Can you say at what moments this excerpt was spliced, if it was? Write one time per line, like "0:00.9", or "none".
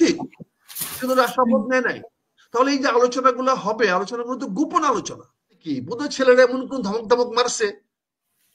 0:05.7